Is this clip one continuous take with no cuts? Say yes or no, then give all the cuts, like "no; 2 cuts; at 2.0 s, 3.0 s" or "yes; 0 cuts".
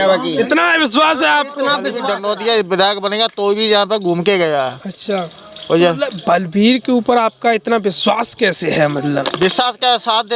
no; 1 cut; at 1.9 s